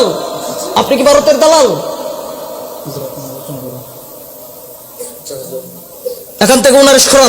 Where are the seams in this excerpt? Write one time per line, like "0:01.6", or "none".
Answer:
none